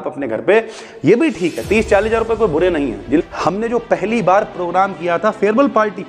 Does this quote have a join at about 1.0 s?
no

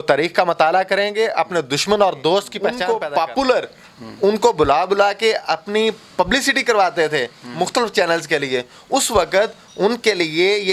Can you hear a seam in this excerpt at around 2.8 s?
yes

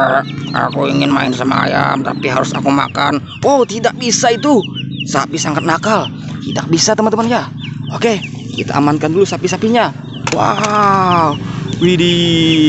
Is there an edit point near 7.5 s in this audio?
no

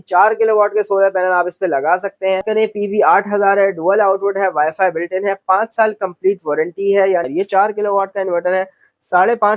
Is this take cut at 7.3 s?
yes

